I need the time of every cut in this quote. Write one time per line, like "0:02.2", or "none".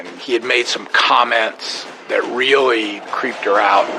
0:03.1